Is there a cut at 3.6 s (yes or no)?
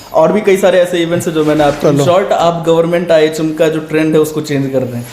no